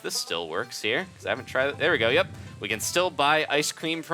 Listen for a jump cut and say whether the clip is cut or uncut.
uncut